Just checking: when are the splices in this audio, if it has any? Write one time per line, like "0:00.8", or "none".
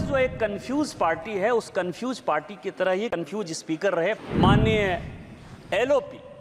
0:04.2